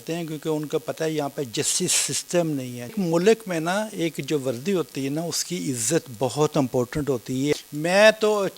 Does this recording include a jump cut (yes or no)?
yes